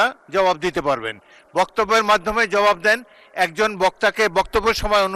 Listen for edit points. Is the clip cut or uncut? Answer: uncut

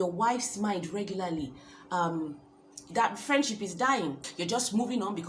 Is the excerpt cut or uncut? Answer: cut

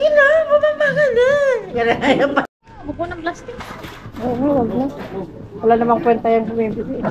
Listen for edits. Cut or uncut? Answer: cut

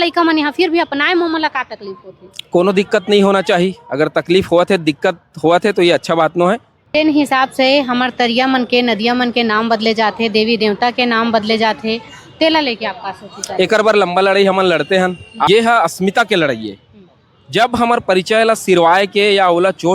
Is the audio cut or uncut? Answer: cut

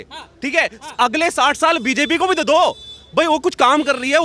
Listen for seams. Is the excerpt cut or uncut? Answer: uncut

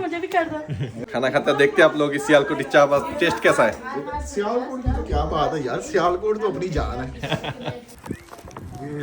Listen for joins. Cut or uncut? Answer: cut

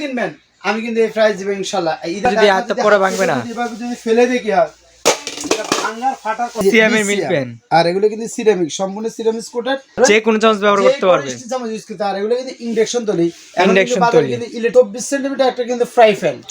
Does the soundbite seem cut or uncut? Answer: cut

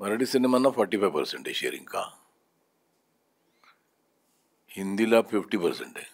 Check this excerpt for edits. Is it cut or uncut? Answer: uncut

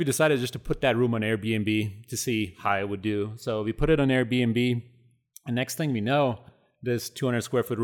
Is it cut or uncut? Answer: uncut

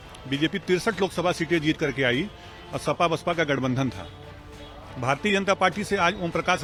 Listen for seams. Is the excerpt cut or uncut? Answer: uncut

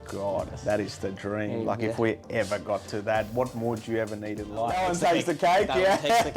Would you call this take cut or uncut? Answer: cut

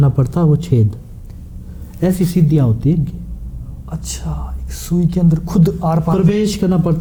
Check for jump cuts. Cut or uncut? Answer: uncut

